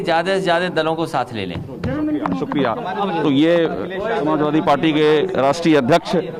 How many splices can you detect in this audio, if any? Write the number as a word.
zero